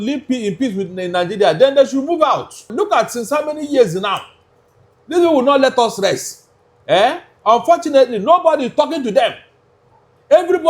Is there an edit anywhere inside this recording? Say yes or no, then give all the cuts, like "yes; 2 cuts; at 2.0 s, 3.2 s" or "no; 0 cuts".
yes; 1 cut; at 2.7 s